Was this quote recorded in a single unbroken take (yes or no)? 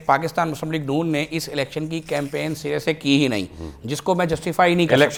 yes